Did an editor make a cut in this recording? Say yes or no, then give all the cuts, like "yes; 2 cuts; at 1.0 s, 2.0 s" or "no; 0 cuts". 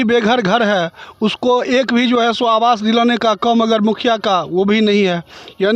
no; 0 cuts